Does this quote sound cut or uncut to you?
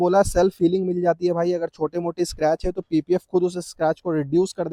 uncut